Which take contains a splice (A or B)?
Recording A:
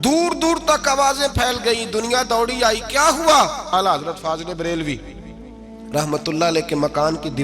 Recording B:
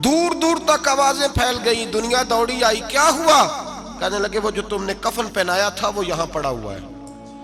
A